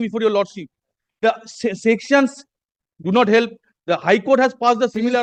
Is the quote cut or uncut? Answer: uncut